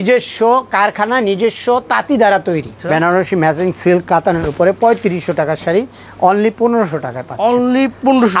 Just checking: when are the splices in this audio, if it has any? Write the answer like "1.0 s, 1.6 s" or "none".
2.7 s